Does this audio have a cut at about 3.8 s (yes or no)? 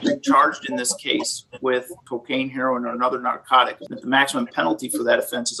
yes